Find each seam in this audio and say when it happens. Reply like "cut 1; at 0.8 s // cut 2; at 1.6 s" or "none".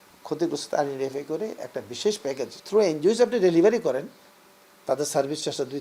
cut 1; at 2.6 s